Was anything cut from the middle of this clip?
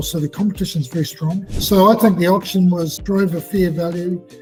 no; 0 cuts

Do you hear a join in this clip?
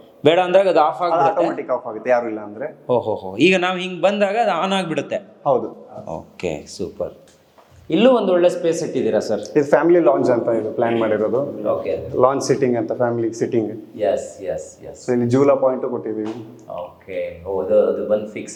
no; 0 cuts

